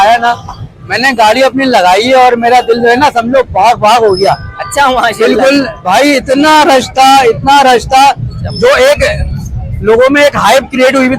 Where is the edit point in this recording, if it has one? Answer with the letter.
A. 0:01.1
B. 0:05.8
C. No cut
C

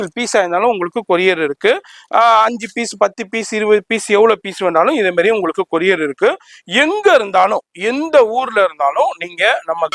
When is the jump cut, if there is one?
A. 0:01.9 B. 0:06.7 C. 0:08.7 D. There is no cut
D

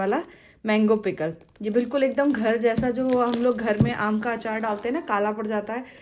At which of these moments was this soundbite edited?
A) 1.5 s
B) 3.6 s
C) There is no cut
C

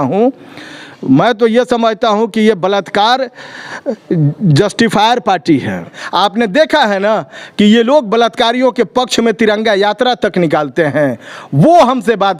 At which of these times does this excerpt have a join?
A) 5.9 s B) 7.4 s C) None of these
A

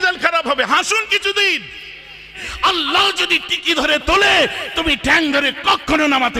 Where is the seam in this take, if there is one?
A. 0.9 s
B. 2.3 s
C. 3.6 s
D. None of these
B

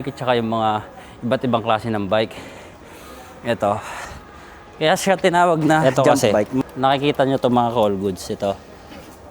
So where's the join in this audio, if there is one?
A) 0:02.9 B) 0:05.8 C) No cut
B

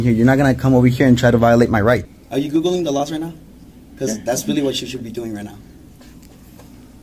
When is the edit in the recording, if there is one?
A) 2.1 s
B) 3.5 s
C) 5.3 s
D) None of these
A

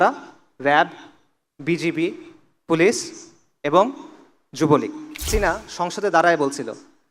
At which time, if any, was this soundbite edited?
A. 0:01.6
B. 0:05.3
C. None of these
B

